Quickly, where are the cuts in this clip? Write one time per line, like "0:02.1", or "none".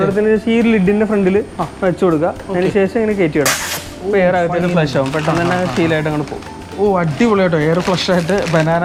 none